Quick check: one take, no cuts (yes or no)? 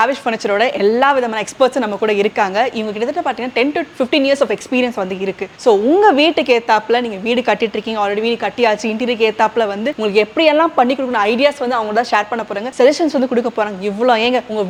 yes